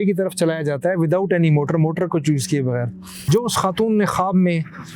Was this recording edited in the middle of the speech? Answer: yes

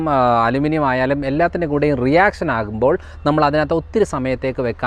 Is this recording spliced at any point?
no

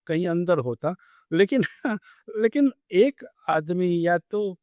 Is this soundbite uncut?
yes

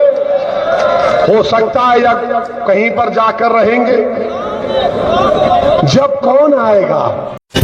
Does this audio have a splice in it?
no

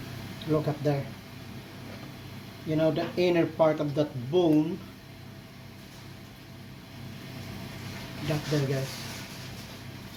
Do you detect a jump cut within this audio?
no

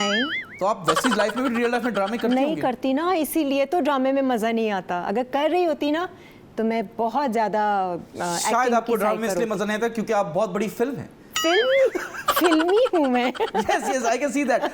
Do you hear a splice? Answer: no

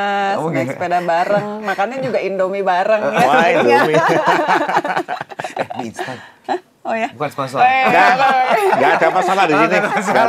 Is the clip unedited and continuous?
yes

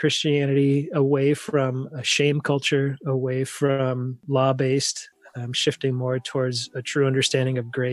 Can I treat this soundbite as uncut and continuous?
no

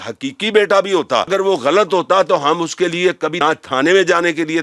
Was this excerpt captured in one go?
no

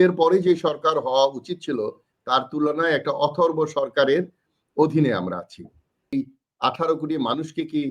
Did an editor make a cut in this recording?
yes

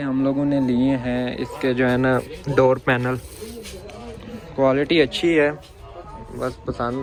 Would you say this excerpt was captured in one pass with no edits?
yes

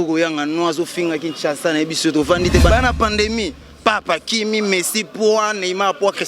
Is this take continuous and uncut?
no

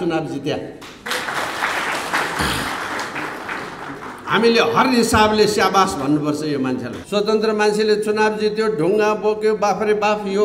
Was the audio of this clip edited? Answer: yes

